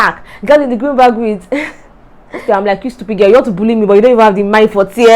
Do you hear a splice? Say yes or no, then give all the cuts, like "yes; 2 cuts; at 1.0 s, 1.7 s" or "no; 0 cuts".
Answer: yes; 1 cut; at 2.4 s